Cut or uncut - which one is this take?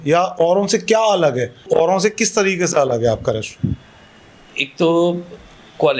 cut